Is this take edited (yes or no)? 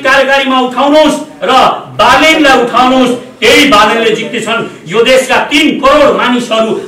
no